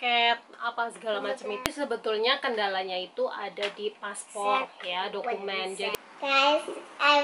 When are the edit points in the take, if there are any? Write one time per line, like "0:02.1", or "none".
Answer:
0:01.7
0:06.1